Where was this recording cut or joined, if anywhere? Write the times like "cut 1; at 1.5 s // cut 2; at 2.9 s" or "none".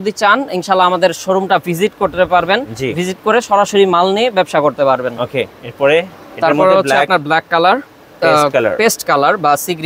none